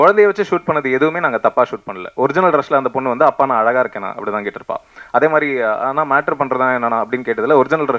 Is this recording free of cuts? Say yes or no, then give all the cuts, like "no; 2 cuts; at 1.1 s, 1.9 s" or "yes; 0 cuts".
yes; 0 cuts